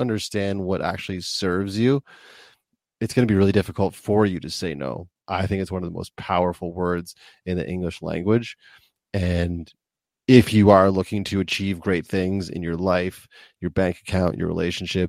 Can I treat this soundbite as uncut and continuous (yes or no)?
no